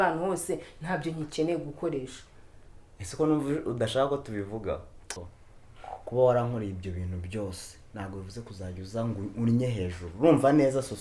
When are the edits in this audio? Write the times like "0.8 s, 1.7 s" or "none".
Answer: 5.2 s